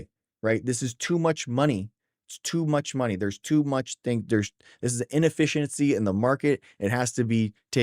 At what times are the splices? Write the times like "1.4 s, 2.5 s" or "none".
none

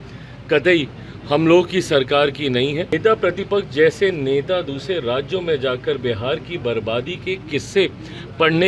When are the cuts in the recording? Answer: 2.9 s

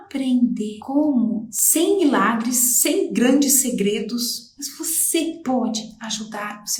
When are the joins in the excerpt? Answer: none

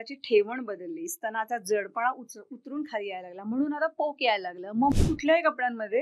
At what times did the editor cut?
4.9 s

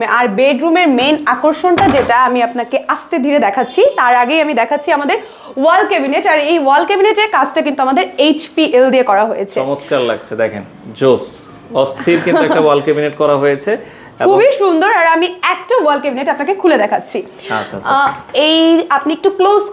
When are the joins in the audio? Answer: none

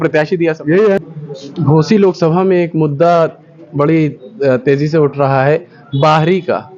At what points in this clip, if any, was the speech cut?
1.0 s

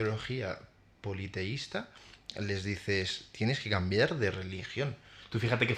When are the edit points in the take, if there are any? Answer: none

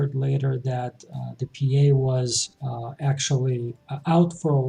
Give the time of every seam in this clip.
none

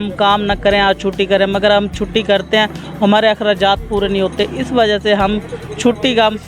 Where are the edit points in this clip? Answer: none

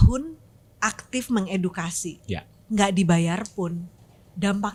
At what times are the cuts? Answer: none

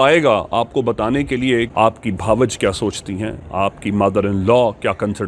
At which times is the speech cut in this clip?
1.7 s

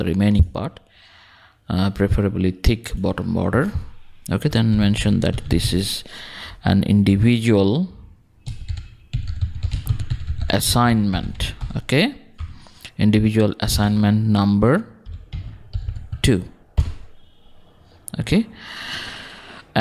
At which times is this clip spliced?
9.2 s

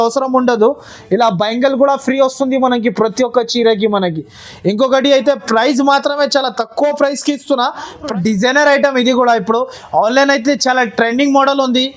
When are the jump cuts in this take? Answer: 8.1 s

